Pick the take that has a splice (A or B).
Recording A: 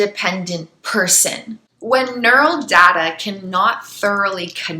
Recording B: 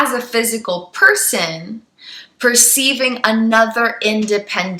A